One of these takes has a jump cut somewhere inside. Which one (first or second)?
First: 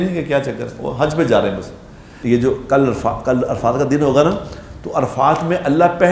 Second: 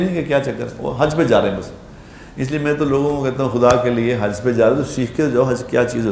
first